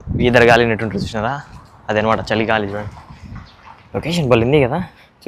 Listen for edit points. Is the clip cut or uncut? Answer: uncut